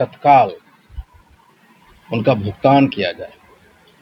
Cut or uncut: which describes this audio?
uncut